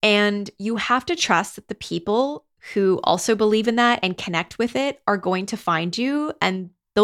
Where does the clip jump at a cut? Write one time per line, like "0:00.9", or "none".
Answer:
none